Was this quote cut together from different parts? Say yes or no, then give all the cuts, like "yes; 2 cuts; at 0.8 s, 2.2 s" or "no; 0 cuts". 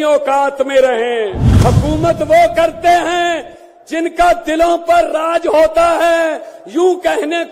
yes; 1 cut; at 1.4 s